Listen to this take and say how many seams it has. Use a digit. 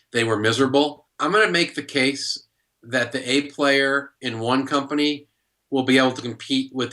1